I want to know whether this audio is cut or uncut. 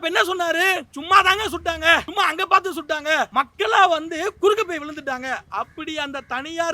cut